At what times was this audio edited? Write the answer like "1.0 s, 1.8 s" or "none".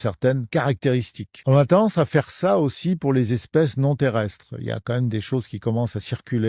none